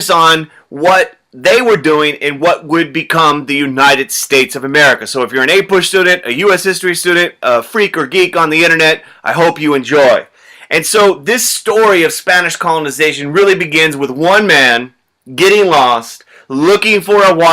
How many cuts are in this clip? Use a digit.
1